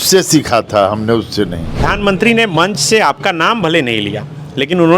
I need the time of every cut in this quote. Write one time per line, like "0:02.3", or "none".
0:01.8